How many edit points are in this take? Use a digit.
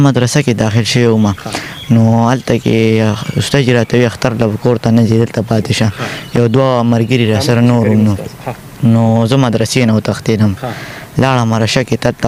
0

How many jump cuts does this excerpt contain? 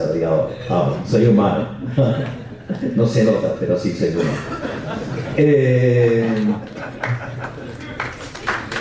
0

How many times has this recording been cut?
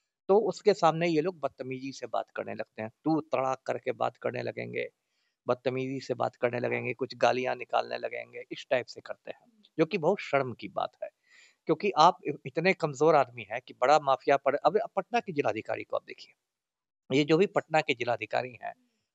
0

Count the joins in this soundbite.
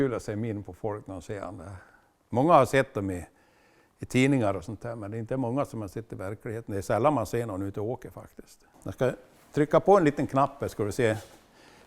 1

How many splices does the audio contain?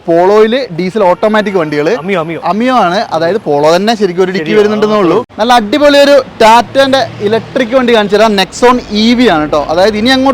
1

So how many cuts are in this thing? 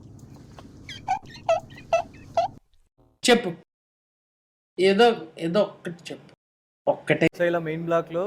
1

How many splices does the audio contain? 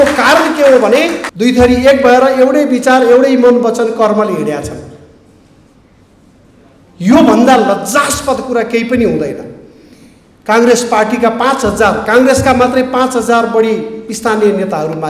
1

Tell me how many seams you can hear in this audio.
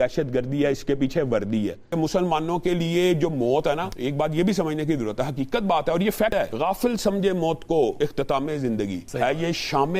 5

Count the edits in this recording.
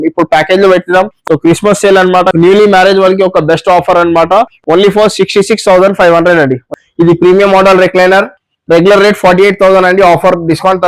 2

